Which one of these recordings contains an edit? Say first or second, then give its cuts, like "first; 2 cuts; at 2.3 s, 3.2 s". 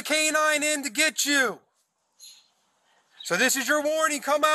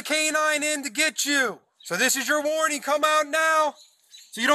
second; 1 cut; at 1.7 s